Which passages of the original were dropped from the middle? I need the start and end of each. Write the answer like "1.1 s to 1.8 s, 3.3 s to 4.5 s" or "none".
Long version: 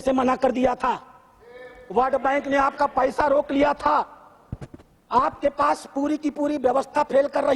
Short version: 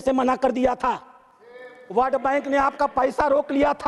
none